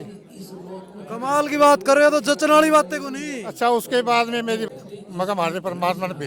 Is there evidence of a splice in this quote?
yes; 1 cut; at 4.6 s

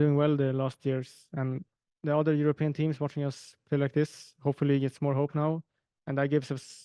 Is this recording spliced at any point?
yes; 1 cut; at 1.7 s

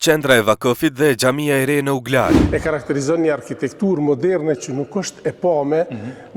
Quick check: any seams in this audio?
yes; 1 cut; at 2.4 s

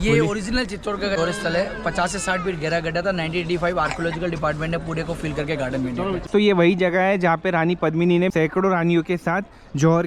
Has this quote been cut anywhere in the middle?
yes; 3 cuts; at 1.2 s, 6.3 s, 8.3 s

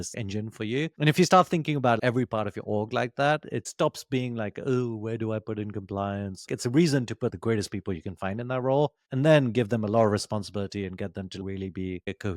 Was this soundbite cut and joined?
yes; 2 cuts; at 3.6 s, 6.5 s

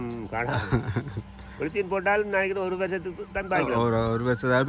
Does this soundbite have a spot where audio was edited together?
no; 0 cuts

